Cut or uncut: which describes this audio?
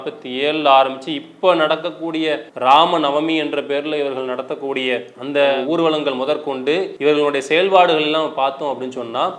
cut